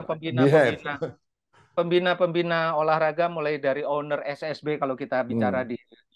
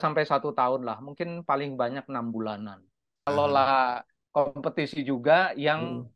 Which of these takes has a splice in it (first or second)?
second